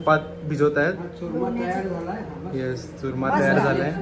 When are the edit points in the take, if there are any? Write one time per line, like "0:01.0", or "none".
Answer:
none